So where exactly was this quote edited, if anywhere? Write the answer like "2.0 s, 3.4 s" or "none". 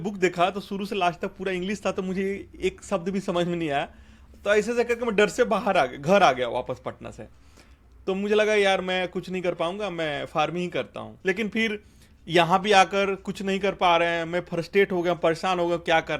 none